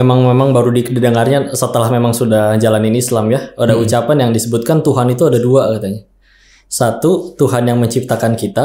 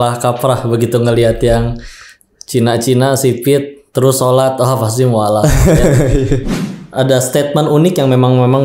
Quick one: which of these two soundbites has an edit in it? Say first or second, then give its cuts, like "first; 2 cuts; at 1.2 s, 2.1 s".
second; 1 cut; at 6.5 s